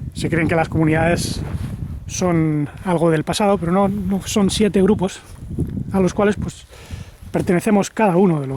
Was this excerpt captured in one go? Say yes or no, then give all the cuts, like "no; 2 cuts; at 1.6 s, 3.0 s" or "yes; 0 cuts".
yes; 0 cuts